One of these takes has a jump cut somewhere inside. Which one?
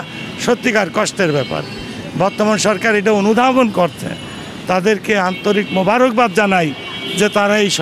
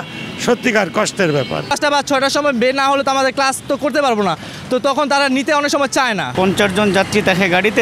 second; 2 cuts; at 1.7 s, 6.3 s

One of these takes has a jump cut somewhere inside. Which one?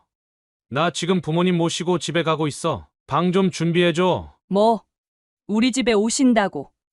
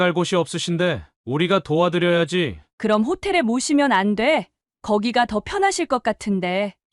first; 1 cut; at 4.3 s

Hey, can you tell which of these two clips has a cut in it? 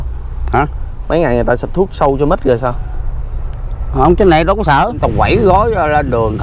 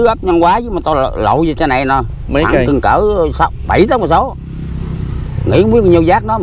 first; 1 cut; at 5.0 s

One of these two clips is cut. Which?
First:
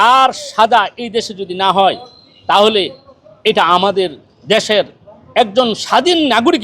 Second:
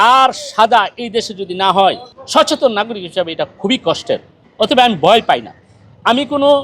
second; 2 cuts; at 2.1 s, 4.4 s

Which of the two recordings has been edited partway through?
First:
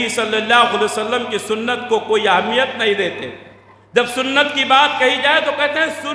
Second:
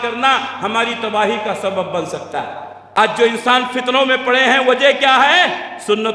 second; 1 cut; at 2.8 s

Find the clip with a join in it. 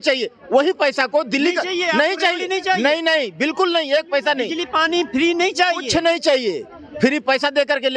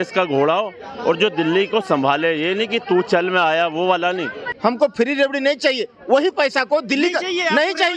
second; 1 cut; at 4.5 s

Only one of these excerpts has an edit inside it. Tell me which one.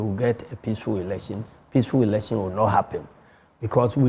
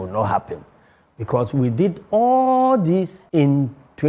second; 1 cut; at 3.2 s

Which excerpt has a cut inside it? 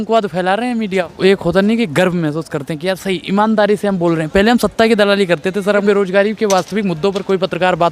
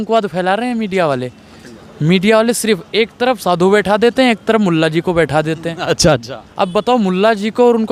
first; 2 cuts; at 1.0 s, 5.8 s

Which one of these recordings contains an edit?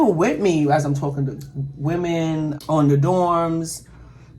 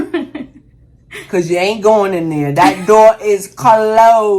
first; 1 cut; at 2.6 s

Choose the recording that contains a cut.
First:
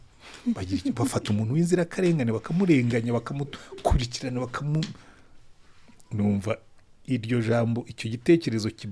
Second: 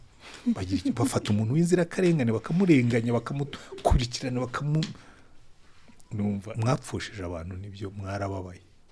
second; 1 cut; at 6.5 s

